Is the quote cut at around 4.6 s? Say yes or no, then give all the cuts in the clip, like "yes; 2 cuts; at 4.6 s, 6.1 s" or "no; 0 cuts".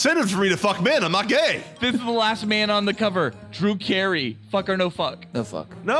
no; 1 cut; at 1.7 s